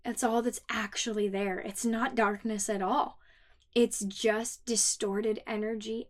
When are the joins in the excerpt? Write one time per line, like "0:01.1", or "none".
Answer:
none